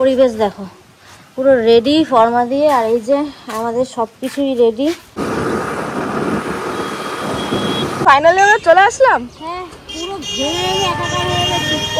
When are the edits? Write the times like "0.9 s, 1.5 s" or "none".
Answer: 5.2 s, 8.1 s